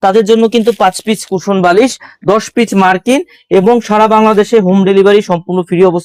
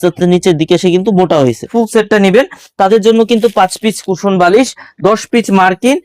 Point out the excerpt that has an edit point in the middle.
second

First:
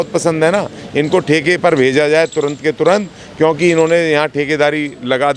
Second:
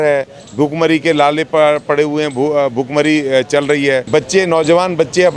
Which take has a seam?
second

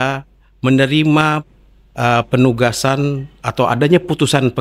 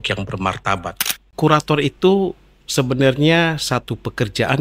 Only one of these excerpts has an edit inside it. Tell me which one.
second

